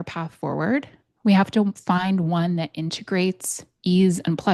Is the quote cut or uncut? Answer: uncut